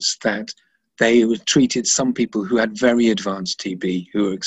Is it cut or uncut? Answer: uncut